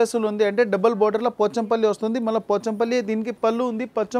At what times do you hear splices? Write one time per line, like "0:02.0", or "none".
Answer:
none